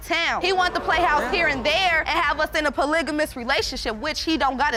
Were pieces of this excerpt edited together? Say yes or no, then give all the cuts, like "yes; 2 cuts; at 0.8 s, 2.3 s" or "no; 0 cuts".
no; 0 cuts